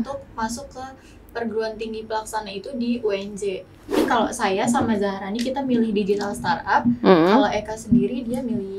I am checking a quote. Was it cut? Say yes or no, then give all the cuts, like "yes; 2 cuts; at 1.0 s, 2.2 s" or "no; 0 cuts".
yes; 1 cut; at 4.0 s